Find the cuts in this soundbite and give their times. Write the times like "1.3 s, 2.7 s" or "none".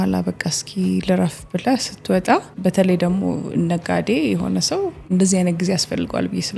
2.5 s, 5.0 s